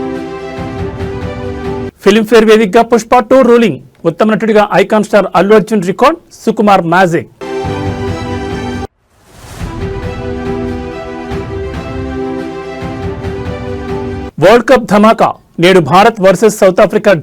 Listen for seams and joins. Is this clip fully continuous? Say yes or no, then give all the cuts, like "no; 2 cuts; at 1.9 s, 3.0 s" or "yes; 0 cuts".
yes; 0 cuts